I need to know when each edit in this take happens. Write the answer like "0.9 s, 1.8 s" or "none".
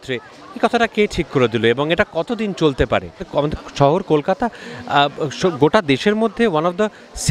3.2 s